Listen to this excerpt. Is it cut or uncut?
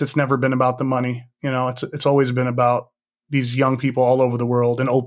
uncut